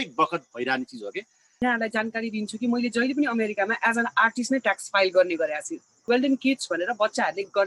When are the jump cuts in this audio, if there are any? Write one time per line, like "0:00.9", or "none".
0:01.5
0:06.1